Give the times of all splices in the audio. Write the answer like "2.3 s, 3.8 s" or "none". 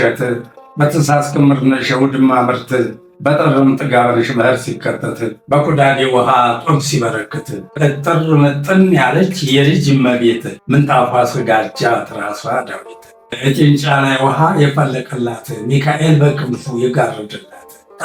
none